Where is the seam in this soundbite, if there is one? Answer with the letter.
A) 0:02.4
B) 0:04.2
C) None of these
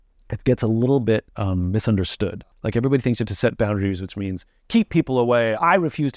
A